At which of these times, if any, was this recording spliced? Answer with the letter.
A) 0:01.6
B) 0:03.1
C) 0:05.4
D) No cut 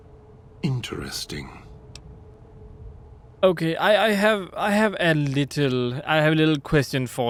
D